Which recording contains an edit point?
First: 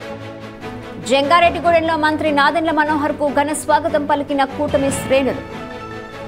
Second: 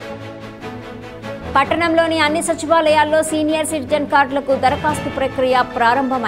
second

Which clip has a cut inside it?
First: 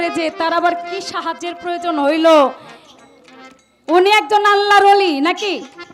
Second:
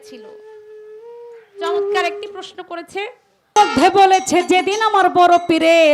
second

